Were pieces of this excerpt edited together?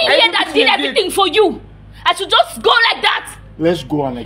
no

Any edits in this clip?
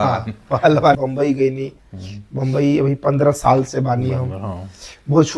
yes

